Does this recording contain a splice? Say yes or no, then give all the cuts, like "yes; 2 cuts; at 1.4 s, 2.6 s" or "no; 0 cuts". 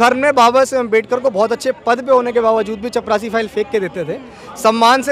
no; 0 cuts